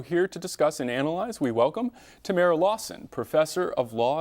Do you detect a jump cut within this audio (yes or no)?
yes